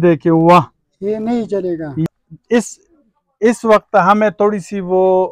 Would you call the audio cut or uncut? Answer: cut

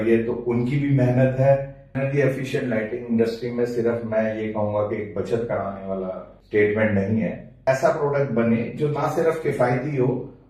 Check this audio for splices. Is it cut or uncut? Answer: cut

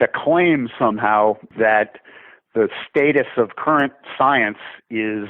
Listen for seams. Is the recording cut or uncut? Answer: cut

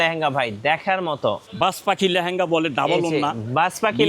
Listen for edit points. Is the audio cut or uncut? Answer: cut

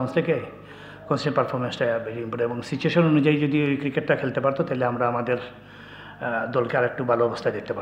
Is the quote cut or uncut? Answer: uncut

